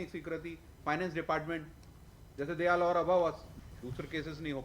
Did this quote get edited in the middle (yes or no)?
yes